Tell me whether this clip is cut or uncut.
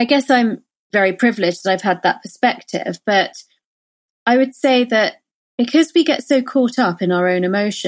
cut